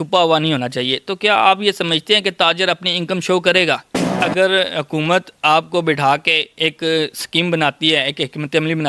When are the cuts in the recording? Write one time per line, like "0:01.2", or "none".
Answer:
0:04.0